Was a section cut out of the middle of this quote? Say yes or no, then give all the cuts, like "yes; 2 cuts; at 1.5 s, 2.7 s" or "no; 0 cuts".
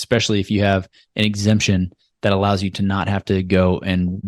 no; 0 cuts